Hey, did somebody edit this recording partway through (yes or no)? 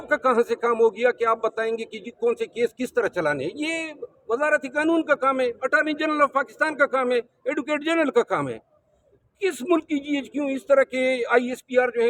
no